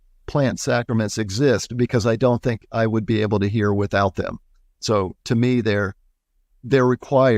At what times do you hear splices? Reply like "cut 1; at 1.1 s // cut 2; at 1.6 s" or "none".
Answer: none